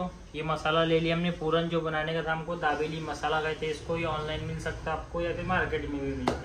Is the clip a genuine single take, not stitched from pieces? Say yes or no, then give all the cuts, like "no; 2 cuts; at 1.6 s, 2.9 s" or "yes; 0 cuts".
yes; 0 cuts